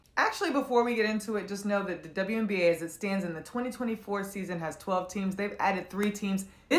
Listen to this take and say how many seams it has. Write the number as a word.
one